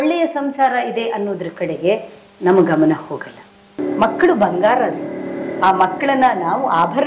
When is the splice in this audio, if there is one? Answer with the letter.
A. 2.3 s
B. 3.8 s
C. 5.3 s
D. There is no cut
B